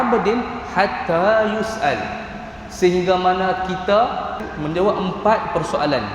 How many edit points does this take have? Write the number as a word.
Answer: one